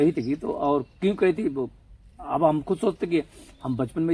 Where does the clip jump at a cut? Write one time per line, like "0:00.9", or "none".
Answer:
none